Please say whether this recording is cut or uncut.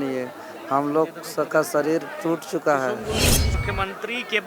cut